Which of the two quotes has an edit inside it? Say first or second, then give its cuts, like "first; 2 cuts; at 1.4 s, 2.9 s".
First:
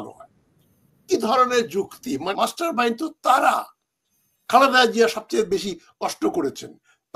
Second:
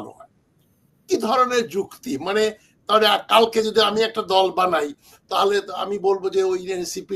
first; 1 cut; at 2.3 s